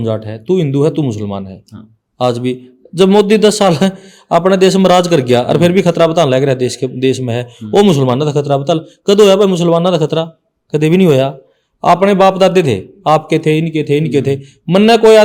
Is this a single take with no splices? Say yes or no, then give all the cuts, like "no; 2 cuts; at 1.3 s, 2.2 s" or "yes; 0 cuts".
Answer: yes; 0 cuts